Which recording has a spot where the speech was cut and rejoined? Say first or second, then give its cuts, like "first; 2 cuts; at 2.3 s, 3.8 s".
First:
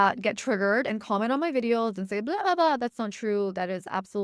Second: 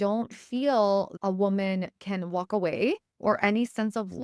second; 2 cuts; at 1.1 s, 3.1 s